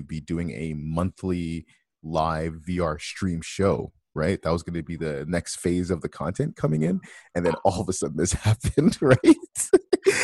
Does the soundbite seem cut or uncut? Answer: uncut